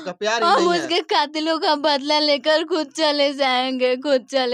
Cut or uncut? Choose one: uncut